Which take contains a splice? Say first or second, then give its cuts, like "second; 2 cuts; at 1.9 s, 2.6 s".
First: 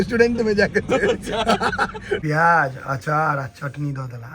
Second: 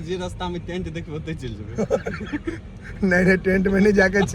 first; 1 cut; at 2.2 s